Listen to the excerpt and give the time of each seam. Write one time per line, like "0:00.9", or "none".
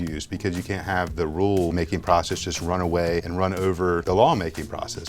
0:01.7
0:03.7